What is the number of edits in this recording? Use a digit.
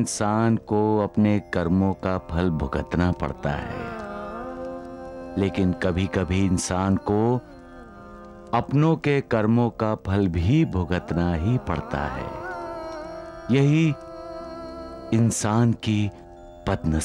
0